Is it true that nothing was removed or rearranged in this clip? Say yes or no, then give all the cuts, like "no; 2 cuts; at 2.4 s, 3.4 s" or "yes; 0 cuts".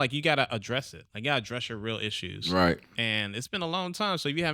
yes; 0 cuts